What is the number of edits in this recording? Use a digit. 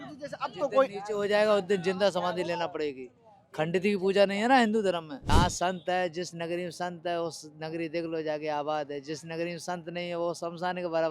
1